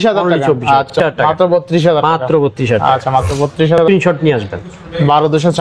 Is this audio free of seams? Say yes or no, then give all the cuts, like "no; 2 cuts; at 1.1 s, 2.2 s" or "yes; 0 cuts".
no; 2 cuts; at 1.0 s, 3.8 s